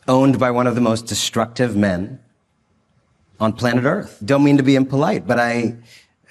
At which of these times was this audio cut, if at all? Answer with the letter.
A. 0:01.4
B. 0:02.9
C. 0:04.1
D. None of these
C